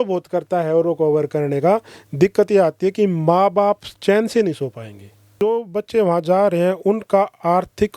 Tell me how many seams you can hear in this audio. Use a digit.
1